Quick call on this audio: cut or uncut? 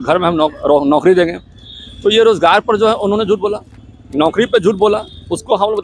uncut